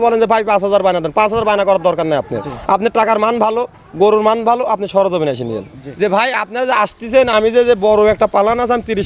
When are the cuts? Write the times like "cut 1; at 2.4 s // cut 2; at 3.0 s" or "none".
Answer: cut 1; at 5.8 s

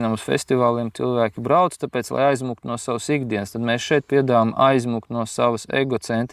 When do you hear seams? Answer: none

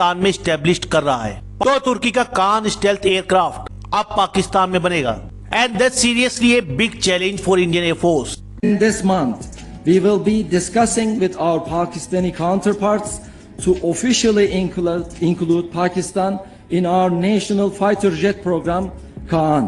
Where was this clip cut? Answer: cut 1; at 1.5 s // cut 2; at 8.5 s

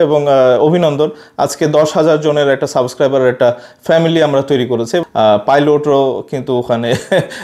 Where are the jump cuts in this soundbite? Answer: cut 1; at 5.0 s

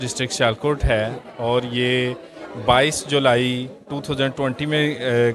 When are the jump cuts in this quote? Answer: none

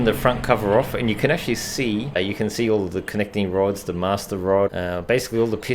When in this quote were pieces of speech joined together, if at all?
cut 1; at 2.2 s // cut 2; at 4.7 s

